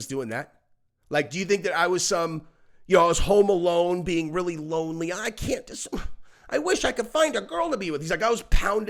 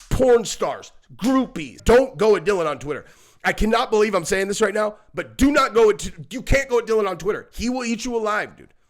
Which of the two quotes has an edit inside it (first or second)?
second